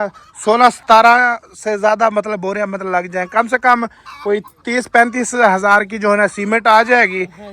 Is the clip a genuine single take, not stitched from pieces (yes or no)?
yes